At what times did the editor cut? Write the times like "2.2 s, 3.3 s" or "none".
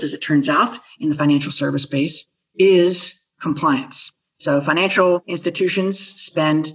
none